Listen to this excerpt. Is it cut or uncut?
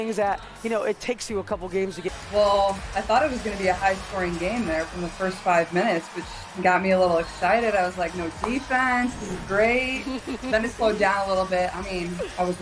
cut